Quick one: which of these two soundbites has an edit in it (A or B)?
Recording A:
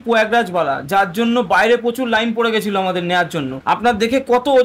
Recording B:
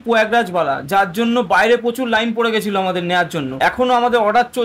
A